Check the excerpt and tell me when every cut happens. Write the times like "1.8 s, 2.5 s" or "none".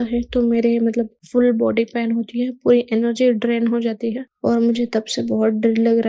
1.2 s, 4.3 s